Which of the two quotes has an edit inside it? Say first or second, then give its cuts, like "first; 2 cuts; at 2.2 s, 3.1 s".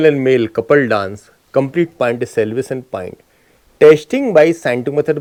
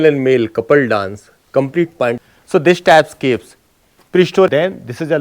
second; 2 cuts; at 2.2 s, 4.5 s